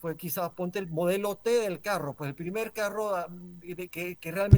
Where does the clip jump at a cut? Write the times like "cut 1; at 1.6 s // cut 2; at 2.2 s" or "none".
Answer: none